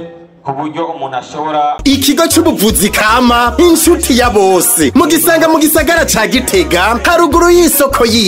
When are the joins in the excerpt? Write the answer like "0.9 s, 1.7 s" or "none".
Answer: 1.8 s